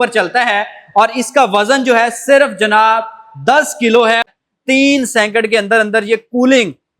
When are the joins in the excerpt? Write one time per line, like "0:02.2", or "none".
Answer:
0:04.3